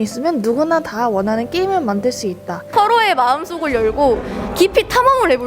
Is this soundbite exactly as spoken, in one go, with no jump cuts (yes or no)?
no